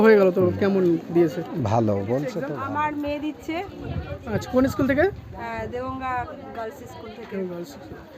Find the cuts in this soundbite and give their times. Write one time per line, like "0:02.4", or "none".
0:02.5